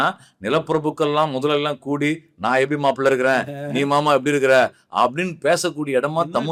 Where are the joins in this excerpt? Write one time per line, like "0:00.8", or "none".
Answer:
none